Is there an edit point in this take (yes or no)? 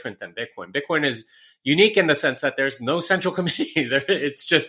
no